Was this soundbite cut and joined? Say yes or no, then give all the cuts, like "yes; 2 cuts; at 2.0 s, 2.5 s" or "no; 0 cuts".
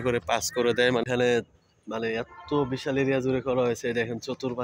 yes; 1 cut; at 1.0 s